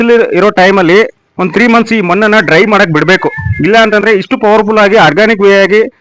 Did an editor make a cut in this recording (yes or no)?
no